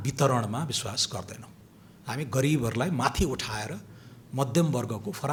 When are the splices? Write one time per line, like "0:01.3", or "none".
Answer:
none